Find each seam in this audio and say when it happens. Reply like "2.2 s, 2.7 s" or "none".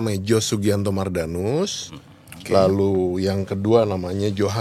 none